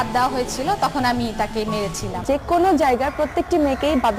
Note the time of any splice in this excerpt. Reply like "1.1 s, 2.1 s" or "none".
2.2 s